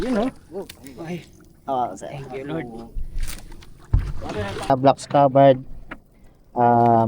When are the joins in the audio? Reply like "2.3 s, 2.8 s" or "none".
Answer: 4.7 s